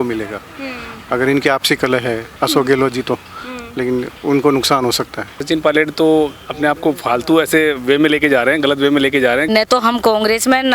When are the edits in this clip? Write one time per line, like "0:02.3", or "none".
0:02.3
0:05.4
0:09.5